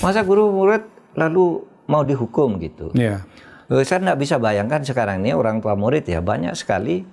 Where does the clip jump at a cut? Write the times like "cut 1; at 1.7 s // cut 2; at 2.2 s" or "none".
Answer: none